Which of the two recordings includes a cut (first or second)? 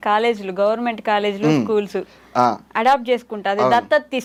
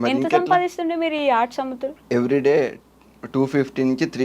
second